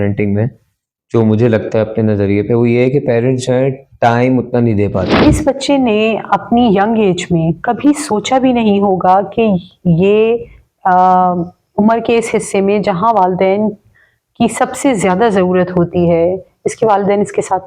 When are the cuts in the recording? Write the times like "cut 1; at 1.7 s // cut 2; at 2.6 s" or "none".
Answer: cut 1; at 5.2 s